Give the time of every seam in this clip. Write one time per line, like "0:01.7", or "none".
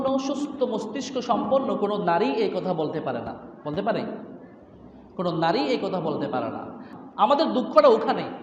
0:06.9